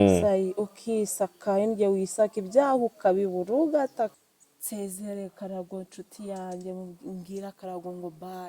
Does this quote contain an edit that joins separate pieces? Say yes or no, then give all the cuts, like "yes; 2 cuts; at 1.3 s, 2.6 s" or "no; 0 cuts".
yes; 1 cut; at 4.2 s